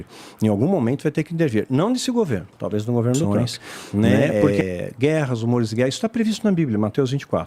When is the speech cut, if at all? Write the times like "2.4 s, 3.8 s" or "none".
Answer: 3.3 s